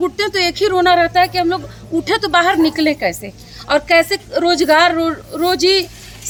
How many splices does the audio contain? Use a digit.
0